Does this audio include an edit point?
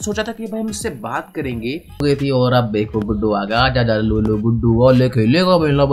yes; 1 cut; at 2.0 s

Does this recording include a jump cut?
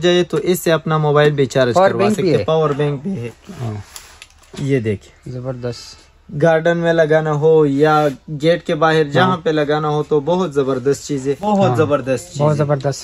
yes; 2 cuts; at 3.3 s, 11.4 s

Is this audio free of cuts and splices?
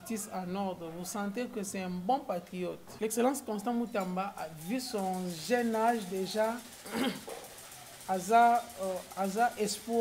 no; 1 cut; at 2.8 s

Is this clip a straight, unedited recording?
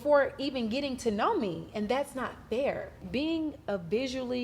no; 1 cut; at 3.0 s

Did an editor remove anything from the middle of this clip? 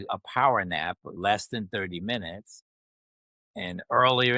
yes; 1 cut; at 1.1 s

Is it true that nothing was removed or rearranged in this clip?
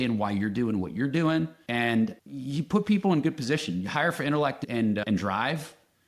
yes; 0 cuts

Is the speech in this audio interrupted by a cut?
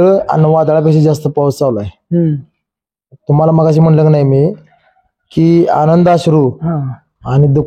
no; 0 cuts

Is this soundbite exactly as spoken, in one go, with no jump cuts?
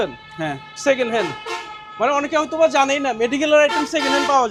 yes; 0 cuts

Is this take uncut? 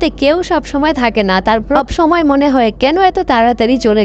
yes; 0 cuts

